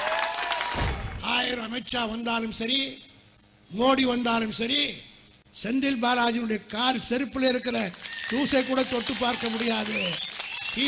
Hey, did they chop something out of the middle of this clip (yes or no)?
yes